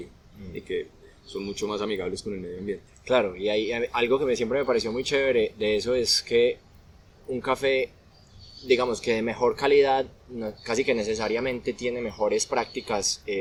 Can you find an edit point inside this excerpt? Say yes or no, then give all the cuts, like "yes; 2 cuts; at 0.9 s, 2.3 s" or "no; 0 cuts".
no; 0 cuts